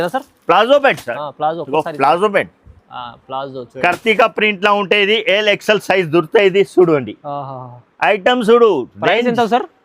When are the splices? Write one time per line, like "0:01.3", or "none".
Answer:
0:03.7